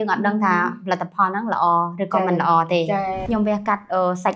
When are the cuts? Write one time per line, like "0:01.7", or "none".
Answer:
0:03.2